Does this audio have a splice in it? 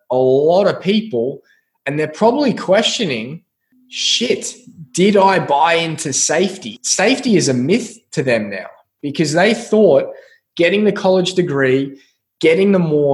yes; 1 cut; at 6.7 s

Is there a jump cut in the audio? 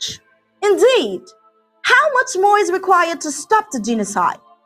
no; 0 cuts

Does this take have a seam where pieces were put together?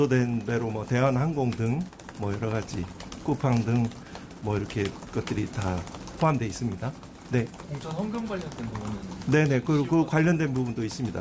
no; 0 cuts

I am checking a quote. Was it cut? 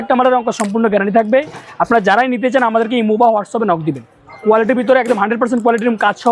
no; 0 cuts

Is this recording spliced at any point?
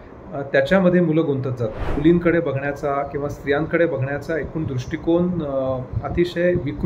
yes; 1 cut; at 1.9 s

